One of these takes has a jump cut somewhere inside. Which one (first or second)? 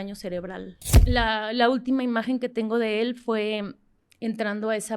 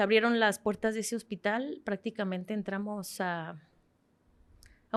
first